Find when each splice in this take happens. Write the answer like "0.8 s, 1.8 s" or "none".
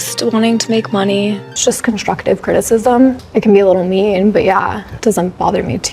1.4 s, 3.2 s, 4.9 s